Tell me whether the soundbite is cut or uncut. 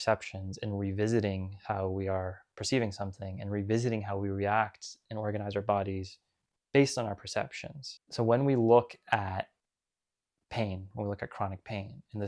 uncut